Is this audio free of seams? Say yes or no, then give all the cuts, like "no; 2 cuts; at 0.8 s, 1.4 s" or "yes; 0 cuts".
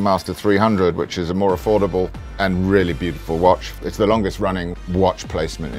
yes; 0 cuts